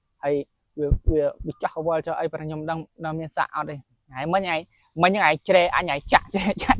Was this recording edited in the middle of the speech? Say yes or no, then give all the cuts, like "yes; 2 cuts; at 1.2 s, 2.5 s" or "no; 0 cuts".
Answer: yes; 1 cut; at 4.0 s